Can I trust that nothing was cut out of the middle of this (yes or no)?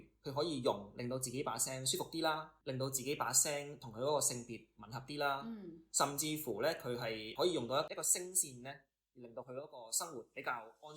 no